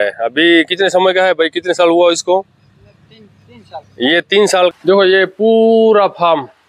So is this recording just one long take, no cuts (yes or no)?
no